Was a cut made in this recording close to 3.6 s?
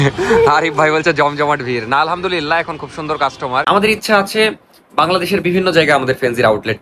yes; 1 cut; at 3.6 s

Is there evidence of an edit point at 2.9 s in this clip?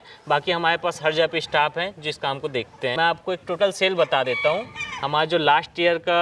yes; 1 cut; at 2.9 s

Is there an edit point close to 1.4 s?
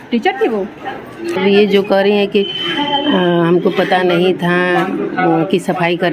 yes; 1 cut; at 1.4 s

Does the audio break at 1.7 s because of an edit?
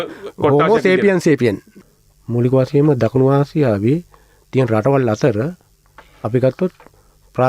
yes; 1 cut; at 1.7 s

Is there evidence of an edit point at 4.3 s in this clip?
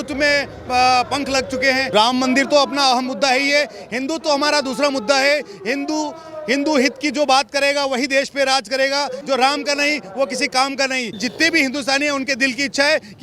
no; 3 cuts; at 1.9 s, 9.2 s, 11.2 s

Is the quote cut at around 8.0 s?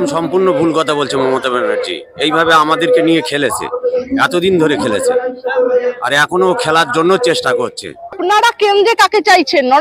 yes; 1 cut; at 8.0 s

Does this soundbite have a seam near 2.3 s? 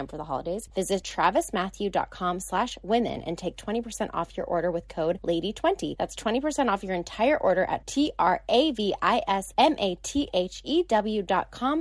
no; 4 cuts; at 1.0 s, 5.2 s, 5.9 s, 9.5 s

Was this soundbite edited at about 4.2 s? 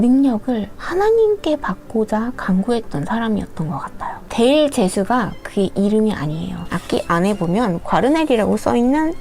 yes; 2 cuts; at 4.2 s, 6.6 s

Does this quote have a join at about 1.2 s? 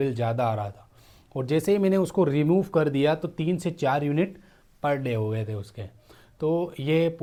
no; 0 cuts

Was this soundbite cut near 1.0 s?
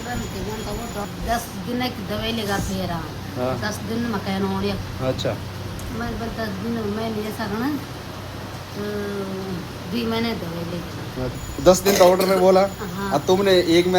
yes; 2 cuts; at 1.0 s, 11.3 s

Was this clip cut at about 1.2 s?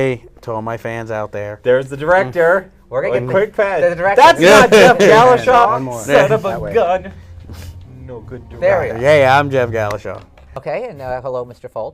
no; 1 cut; at 7.8 s

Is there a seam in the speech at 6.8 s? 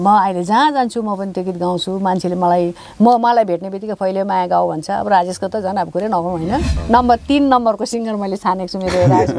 yes; 1 cut; at 6.8 s

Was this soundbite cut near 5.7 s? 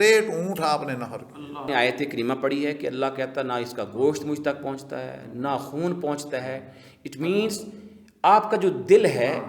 no; 1 cut; at 1.6 s

